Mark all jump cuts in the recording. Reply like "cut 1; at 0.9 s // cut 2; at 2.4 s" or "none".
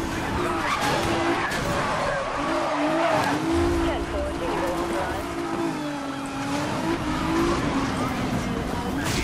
none